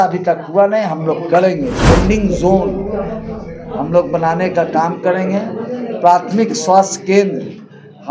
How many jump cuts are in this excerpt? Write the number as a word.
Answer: one